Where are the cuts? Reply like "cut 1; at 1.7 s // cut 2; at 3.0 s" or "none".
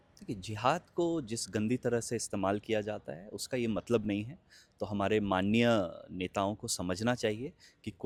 none